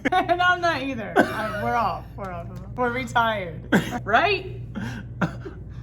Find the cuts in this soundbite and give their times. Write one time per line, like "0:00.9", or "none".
0:02.7
0:03.9